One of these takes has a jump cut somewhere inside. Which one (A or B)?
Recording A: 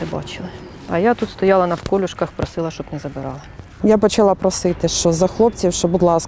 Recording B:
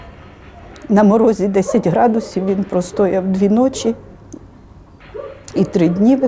A